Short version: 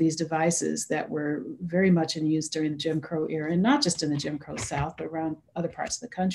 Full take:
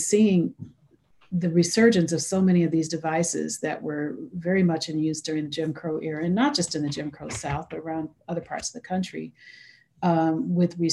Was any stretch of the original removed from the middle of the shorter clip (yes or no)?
no